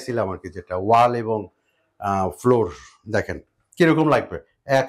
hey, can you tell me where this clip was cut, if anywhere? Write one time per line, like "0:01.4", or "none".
none